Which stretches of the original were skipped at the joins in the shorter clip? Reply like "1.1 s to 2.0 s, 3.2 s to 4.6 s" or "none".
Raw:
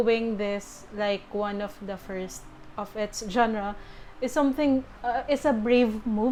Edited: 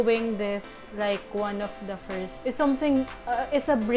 2.3 s to 4.1 s